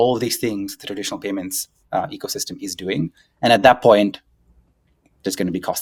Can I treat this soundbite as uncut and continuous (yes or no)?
yes